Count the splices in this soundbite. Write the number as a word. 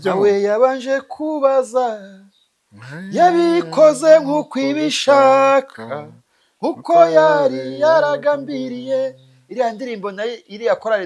zero